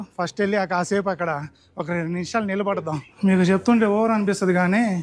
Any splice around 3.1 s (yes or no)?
yes